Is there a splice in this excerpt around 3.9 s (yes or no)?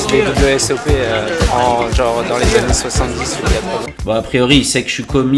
yes